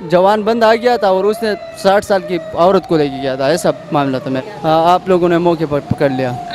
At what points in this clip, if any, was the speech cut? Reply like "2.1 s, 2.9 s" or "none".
4.5 s